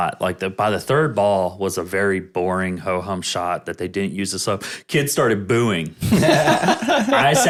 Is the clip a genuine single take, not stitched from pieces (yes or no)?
yes